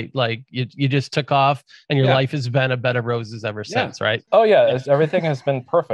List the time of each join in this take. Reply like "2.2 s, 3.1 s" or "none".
4.2 s